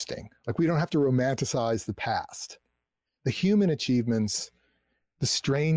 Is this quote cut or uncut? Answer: uncut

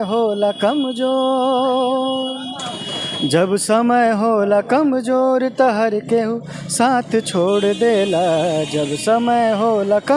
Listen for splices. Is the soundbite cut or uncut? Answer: uncut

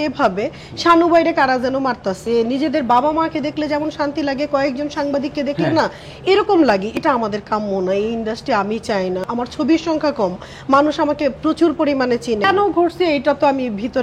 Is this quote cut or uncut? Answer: cut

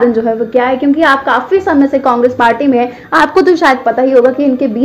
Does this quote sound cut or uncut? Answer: uncut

